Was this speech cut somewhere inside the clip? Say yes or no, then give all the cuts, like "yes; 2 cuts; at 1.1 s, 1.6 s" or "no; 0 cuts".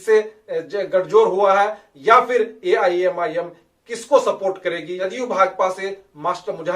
yes; 1 cut; at 5.1 s